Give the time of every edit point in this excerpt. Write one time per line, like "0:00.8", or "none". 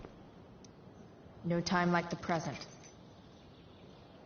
0:01.4
0:02.6